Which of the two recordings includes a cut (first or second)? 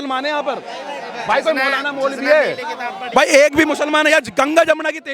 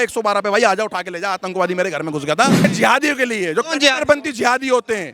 second